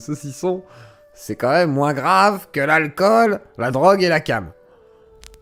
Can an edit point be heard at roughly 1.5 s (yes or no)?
no